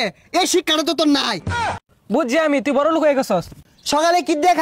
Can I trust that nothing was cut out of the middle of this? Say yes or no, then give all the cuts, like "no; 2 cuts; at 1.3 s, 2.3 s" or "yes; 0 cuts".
no; 2 cuts; at 1.8 s, 3.6 s